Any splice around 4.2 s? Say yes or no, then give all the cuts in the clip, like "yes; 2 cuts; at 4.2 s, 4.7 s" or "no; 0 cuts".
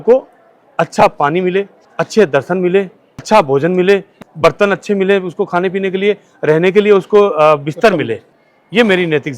yes; 1 cut; at 4.2 s